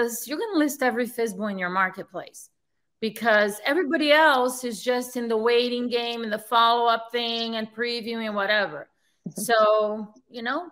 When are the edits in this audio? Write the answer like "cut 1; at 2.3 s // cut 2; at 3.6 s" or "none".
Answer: none